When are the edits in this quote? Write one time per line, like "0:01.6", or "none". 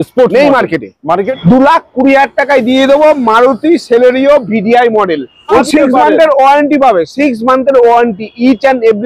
0:01.3
0:05.6